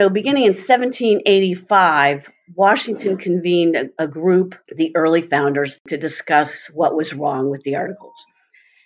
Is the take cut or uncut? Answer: cut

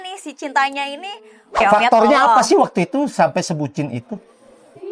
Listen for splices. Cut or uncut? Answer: cut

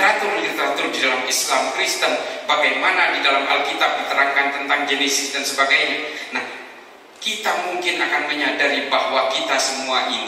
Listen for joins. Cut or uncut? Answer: uncut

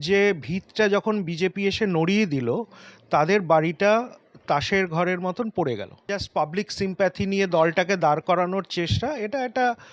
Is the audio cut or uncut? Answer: cut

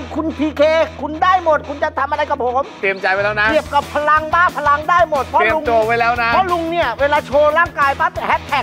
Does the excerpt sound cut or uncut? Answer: uncut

